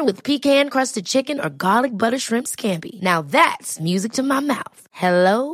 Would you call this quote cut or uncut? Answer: uncut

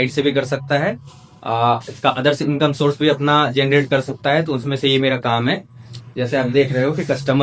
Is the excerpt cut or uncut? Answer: uncut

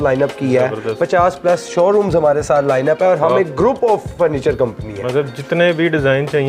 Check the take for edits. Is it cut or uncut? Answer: uncut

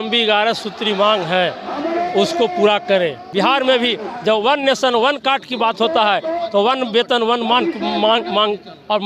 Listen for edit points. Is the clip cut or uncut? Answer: cut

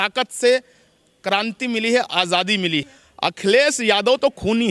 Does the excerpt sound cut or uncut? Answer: cut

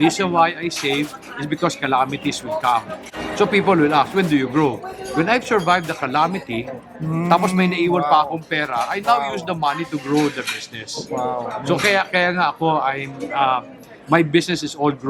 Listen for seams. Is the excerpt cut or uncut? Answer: uncut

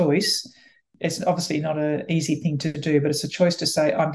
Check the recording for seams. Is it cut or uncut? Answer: cut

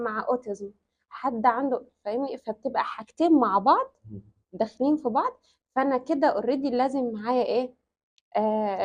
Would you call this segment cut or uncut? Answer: uncut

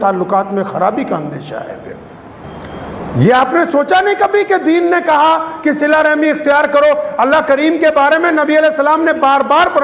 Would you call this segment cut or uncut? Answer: cut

